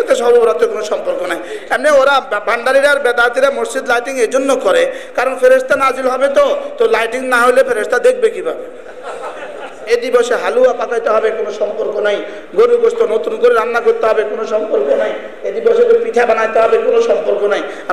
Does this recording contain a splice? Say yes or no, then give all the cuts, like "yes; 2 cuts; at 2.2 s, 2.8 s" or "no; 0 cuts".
yes; 1 cut; at 9.7 s